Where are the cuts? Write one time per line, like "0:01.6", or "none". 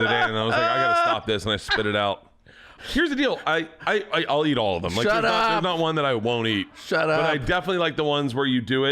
0:02.8